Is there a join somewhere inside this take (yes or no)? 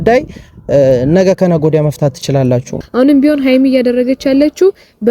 yes